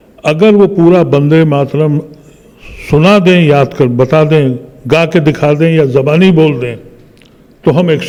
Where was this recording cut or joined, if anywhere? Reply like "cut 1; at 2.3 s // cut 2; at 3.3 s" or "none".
none